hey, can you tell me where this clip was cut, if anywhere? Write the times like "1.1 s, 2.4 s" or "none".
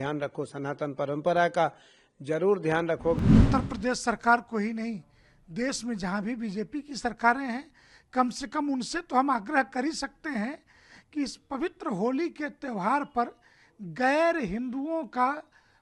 3.2 s